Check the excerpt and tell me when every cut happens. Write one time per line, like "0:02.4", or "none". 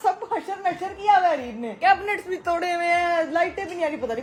none